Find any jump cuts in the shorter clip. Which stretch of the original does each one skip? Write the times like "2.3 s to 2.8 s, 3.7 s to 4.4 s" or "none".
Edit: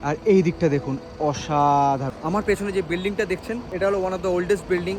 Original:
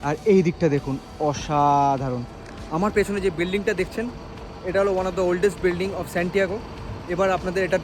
2.1 s to 2.6 s, 4.1 s to 4.6 s